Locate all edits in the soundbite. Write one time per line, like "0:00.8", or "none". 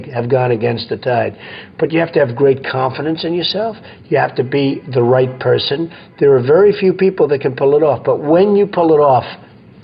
none